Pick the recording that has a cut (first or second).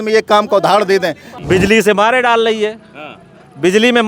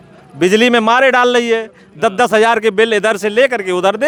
first